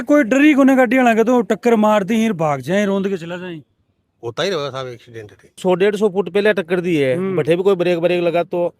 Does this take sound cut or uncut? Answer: cut